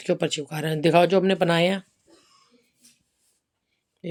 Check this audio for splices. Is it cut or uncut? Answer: uncut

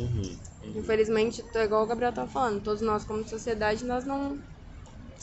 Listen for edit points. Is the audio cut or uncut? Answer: uncut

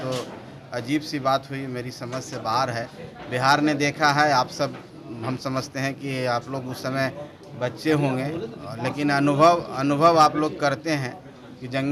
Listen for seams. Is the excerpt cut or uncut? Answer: uncut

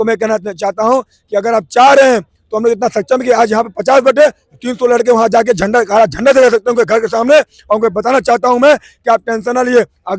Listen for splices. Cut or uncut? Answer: uncut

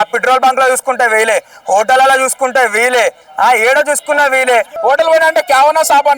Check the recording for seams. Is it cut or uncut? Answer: cut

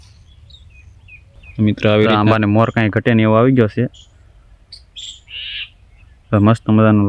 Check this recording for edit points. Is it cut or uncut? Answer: cut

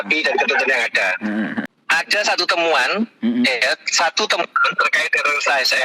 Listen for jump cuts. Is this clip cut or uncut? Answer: cut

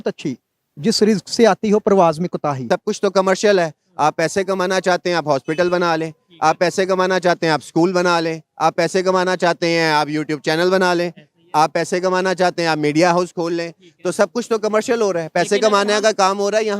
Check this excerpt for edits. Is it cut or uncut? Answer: cut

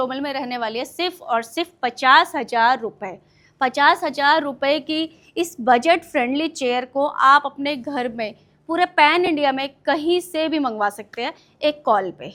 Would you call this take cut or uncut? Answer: uncut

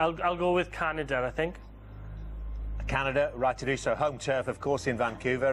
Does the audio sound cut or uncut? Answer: cut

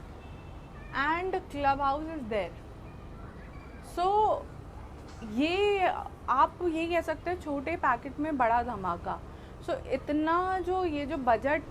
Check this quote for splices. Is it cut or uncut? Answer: uncut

